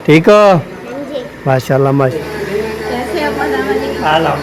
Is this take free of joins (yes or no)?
no